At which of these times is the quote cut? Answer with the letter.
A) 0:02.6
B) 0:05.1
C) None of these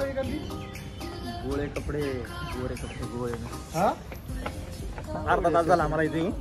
B